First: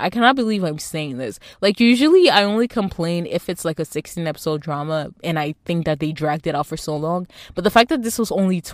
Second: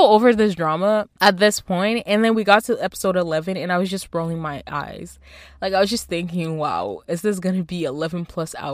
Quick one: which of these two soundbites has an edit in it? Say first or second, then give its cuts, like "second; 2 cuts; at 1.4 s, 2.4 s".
second; 1 cut; at 1.1 s